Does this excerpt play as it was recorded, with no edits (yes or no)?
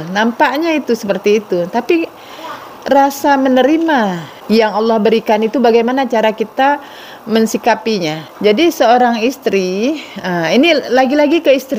no